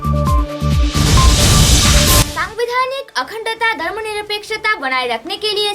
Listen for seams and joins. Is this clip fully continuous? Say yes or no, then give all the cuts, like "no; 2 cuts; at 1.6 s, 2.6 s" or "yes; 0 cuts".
no; 1 cut; at 2.2 s